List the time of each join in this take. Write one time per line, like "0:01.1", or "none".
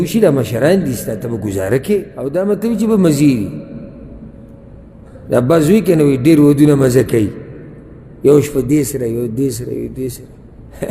0:02.2